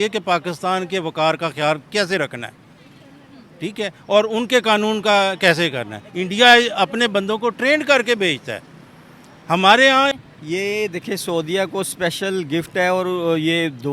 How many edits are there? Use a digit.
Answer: 1